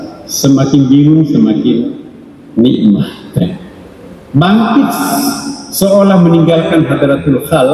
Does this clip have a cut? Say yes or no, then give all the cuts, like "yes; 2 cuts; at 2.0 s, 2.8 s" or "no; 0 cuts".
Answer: yes; 1 cut; at 3.4 s